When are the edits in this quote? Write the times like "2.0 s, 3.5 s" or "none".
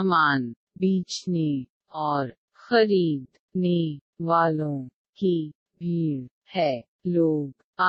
none